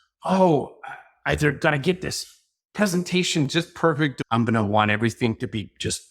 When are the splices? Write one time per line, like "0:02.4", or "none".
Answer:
0:04.1